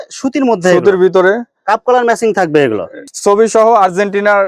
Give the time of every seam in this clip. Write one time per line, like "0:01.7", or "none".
0:03.1

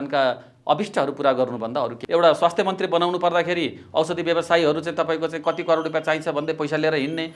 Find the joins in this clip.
0:02.0

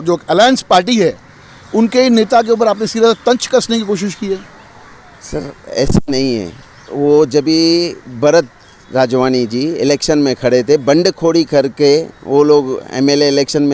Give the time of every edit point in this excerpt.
none

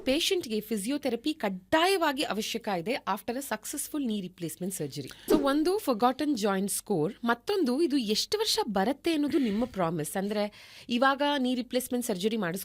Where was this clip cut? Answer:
0:05.1

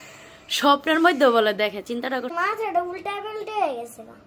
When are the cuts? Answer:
0:02.3

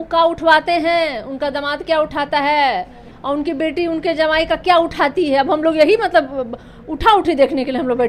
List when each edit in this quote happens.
none

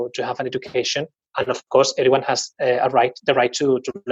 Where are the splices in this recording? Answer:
none

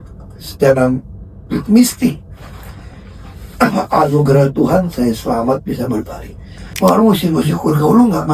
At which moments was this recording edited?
0:06.2

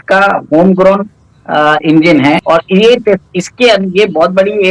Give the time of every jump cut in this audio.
0:02.4

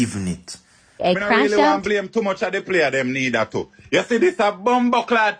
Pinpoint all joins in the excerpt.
0:01.0

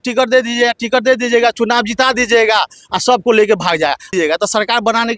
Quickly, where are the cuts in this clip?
0:04.1

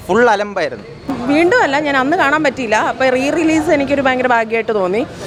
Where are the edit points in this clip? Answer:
none

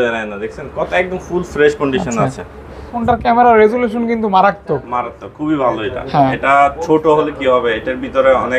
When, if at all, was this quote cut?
0:02.9

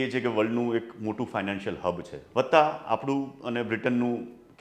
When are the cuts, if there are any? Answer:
0:02.1

